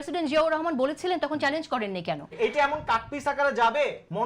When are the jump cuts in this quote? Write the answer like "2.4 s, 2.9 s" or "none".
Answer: 2.3 s